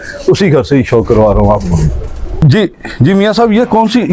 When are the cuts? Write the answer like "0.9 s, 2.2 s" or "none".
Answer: 2.3 s